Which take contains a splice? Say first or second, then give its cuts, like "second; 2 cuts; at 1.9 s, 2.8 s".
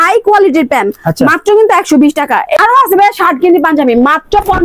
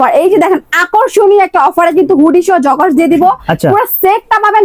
first; 1 cut; at 2.5 s